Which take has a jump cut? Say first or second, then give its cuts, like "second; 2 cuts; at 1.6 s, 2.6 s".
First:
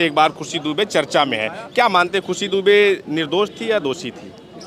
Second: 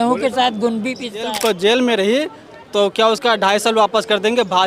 second; 1 cut; at 1.3 s